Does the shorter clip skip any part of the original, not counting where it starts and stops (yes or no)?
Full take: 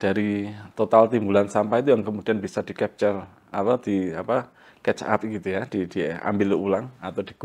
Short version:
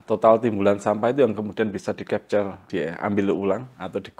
yes